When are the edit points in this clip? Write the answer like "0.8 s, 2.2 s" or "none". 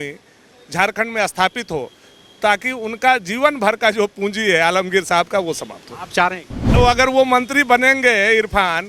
6.7 s